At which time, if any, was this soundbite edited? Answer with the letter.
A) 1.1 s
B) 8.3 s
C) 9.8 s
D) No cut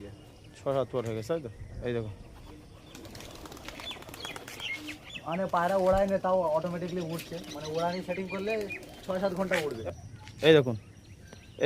C